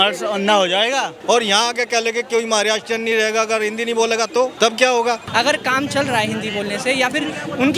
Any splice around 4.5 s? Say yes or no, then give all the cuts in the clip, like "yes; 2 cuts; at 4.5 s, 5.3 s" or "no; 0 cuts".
yes; 3 cuts; at 1.1 s, 4.5 s, 5.3 s